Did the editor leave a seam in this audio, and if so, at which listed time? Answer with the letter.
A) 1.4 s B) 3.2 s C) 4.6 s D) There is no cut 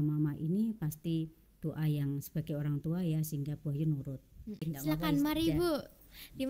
C